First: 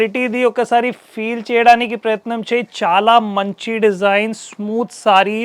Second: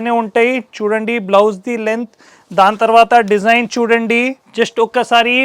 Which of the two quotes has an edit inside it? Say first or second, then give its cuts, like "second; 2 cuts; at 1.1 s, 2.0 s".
second; 1 cut; at 4.4 s